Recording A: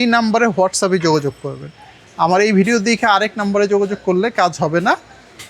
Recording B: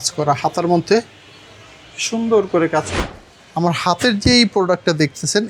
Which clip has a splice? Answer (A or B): B